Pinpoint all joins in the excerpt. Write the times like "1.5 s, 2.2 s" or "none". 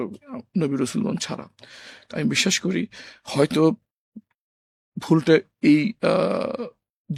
none